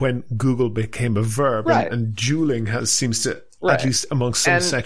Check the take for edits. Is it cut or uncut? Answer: uncut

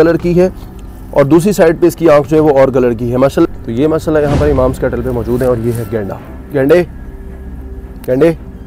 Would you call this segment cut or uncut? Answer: cut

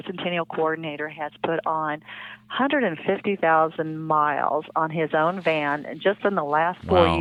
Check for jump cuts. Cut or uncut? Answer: uncut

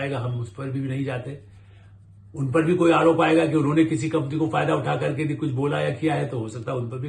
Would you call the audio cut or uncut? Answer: uncut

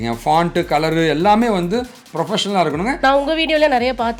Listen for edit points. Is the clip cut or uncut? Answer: cut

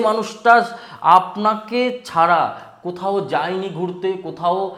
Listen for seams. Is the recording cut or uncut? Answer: uncut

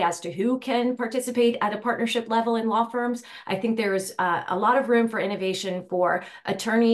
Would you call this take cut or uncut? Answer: uncut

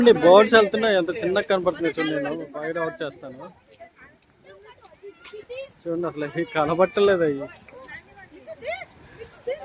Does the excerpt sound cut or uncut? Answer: uncut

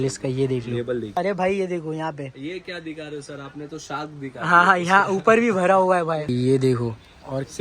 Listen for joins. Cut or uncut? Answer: cut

